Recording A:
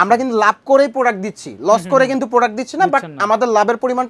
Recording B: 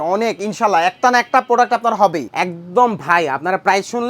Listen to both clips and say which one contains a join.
B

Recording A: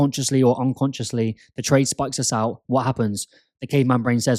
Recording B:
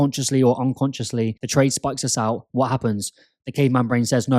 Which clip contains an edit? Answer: B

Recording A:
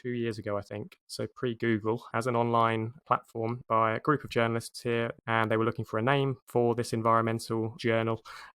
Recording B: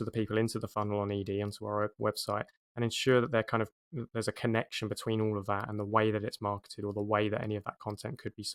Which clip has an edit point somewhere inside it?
A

